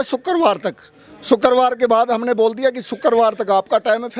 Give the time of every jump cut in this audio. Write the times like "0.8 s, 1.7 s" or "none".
none